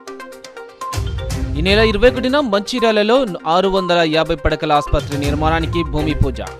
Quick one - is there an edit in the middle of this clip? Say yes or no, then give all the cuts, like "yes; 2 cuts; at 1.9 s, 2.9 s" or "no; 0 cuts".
no; 0 cuts